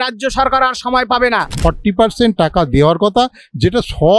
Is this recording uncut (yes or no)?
no